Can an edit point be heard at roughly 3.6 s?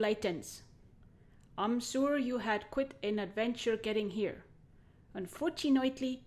yes; 1 cut; at 3.6 s

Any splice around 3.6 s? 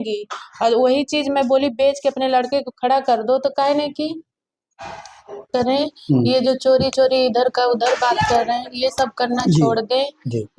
no; 1 cut; at 5.4 s

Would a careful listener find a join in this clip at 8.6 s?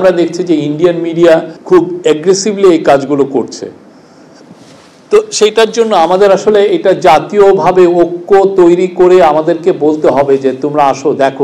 no; 1 cut; at 1.5 s

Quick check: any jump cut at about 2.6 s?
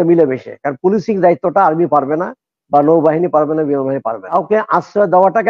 no; 1 cut; at 4.3 s

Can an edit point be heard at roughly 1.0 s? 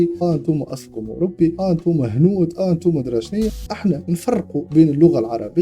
no; 1 cut; at 3.6 s

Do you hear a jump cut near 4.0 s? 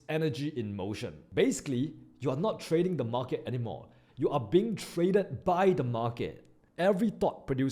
no; 2 cuts; at 1.1 s, 6.6 s

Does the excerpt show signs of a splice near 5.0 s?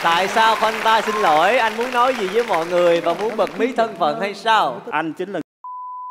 no; 0 cuts

